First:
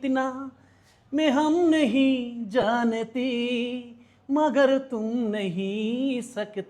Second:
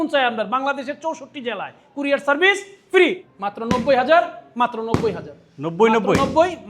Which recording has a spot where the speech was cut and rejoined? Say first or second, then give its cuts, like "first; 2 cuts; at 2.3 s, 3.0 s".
second; 1 cut; at 3.2 s